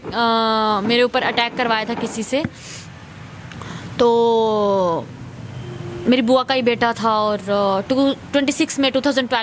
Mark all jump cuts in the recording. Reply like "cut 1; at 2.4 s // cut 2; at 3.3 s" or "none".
none